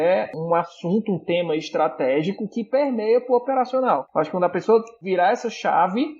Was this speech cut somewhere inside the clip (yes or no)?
yes